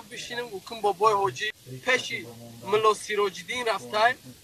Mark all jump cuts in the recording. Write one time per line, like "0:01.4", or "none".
0:01.7